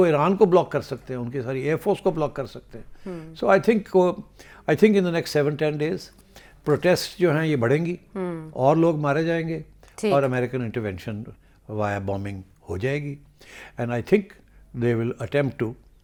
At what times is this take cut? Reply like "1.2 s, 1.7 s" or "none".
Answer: none